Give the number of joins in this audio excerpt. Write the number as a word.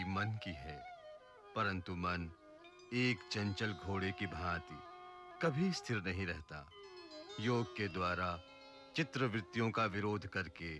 zero